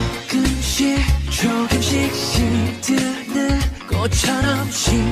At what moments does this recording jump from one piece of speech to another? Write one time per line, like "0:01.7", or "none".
none